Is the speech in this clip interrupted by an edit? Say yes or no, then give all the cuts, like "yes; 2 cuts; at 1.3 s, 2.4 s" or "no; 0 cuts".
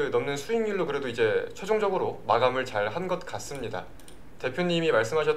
no; 0 cuts